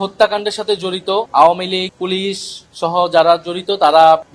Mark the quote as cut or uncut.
cut